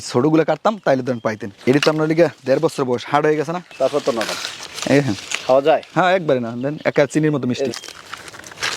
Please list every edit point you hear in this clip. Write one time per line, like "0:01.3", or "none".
0:07.7